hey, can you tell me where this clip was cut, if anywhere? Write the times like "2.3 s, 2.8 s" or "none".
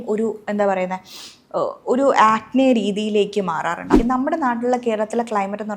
4.0 s